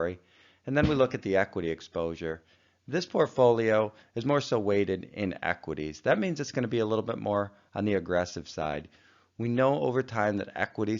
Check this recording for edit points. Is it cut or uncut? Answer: cut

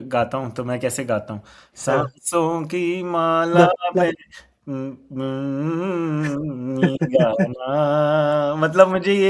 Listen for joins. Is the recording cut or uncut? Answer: uncut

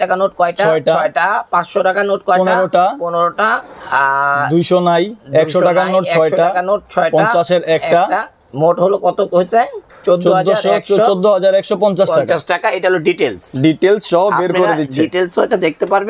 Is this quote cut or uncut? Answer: uncut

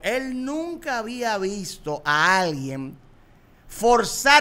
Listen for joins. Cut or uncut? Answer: uncut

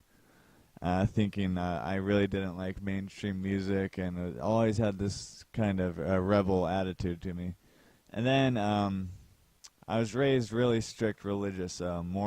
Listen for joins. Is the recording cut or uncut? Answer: cut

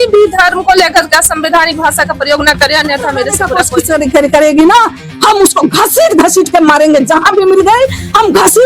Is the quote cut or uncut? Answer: cut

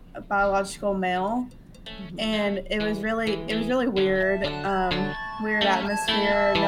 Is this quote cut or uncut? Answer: uncut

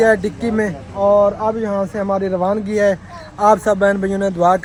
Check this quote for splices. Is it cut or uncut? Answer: uncut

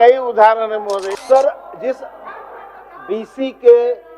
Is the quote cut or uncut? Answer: cut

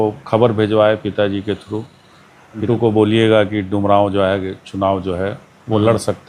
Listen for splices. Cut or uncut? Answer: cut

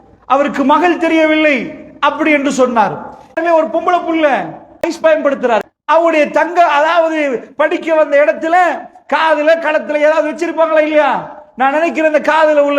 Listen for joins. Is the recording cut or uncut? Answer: cut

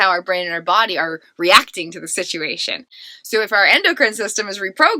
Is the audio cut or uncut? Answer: uncut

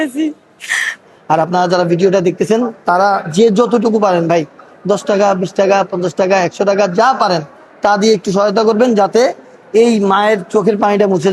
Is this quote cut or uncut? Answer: cut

